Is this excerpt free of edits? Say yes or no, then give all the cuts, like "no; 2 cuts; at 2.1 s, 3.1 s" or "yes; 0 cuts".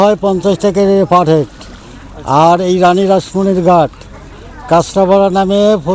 yes; 0 cuts